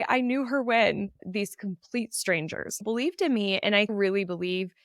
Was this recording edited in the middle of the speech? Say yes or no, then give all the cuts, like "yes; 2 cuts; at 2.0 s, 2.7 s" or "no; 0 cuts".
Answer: yes; 2 cuts; at 1.1 s, 2.8 s